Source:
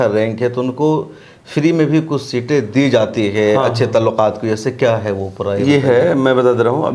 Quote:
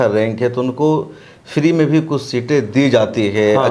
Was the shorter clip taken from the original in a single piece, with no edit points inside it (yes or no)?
yes